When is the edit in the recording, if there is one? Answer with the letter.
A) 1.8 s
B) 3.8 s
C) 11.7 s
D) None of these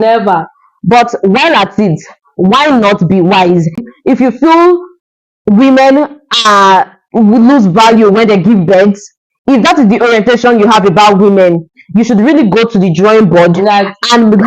B